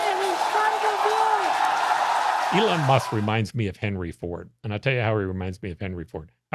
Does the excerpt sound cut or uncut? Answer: cut